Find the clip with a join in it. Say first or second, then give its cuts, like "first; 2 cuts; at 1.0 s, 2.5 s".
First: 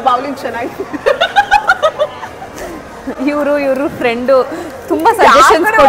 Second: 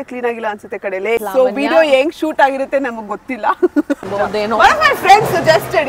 second; 2 cuts; at 1.2 s, 4.0 s